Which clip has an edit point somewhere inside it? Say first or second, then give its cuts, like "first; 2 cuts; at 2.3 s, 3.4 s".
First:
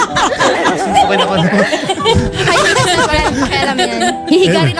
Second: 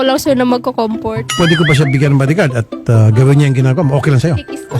second; 1 cut; at 1.3 s